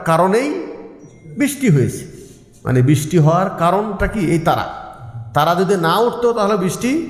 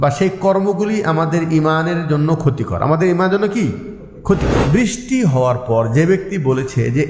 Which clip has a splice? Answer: second; 1 cut; at 4.5 s

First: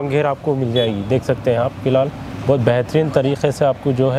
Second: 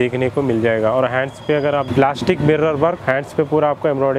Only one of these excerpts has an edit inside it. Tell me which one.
second; 2 cuts; at 1.9 s, 3.0 s

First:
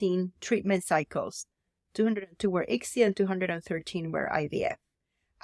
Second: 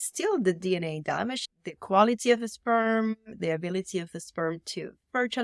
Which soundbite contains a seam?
second; 1 cut; at 3.3 s

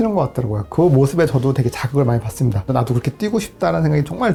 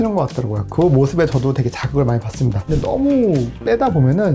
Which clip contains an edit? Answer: second; 1 cut; at 2.7 s

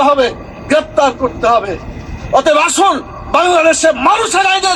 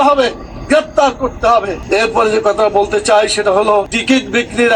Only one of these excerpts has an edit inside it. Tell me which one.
first; 1 cut; at 2.0 s

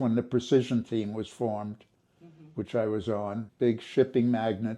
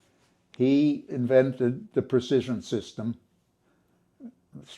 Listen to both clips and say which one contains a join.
first; 1 cut; at 3.4 s

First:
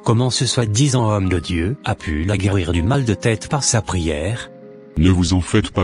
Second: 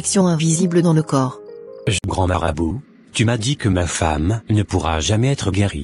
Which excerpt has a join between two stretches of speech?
second; 1 cut; at 2.0 s

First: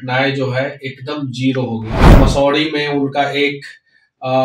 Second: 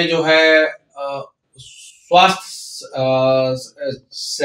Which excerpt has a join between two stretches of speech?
first; 1 cut; at 2.0 s

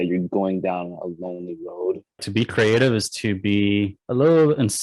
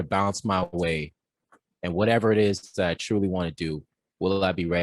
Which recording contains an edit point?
first; 2 cuts; at 2.2 s, 4.0 s

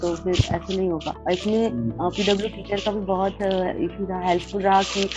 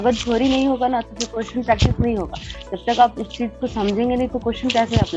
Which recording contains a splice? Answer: first; 1 cut; at 1.1 s

